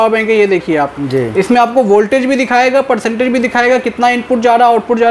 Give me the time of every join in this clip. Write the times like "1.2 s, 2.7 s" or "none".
none